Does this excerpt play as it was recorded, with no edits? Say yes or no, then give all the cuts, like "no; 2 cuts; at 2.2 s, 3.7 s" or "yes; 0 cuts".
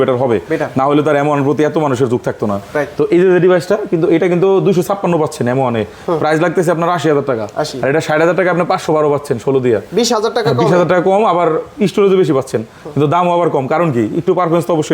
yes; 0 cuts